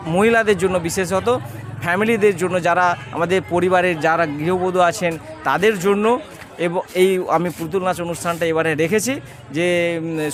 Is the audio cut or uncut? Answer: uncut